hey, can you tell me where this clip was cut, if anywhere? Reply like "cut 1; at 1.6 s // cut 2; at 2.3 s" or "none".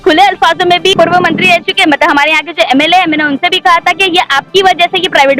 cut 1; at 0.9 s